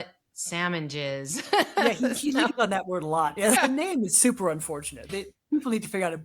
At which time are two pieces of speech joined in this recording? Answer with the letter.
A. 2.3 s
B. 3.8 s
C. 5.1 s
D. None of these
C